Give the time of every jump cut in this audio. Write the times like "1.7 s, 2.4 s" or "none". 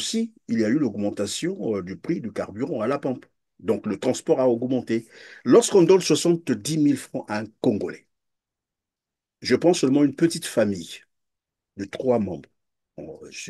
none